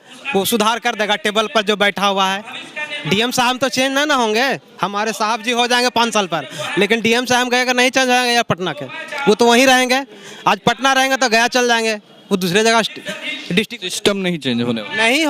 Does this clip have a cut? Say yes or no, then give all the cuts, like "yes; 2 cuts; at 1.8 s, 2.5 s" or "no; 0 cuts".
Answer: no; 0 cuts